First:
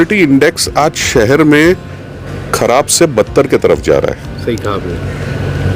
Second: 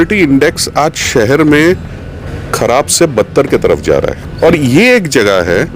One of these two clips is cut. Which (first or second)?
second